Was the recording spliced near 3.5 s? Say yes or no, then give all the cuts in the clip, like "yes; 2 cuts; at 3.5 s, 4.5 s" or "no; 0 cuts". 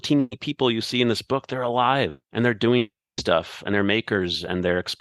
no; 1 cut; at 2.2 s